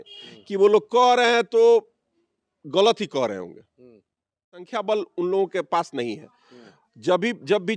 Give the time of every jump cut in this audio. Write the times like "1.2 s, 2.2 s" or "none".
4.7 s